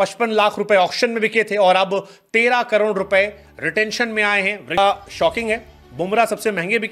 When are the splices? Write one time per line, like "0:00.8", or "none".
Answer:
0:04.8